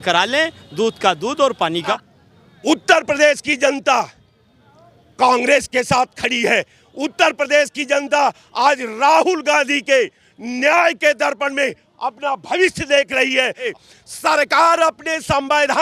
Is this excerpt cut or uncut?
cut